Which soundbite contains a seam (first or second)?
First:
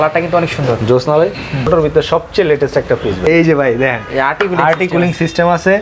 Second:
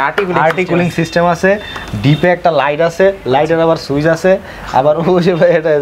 first